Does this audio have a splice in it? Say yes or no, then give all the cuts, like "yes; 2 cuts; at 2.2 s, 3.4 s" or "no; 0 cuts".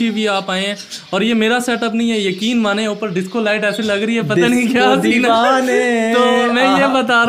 no; 0 cuts